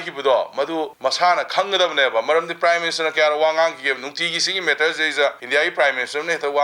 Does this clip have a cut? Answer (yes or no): yes